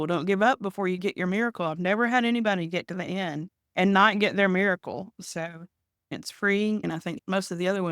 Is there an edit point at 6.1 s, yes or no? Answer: yes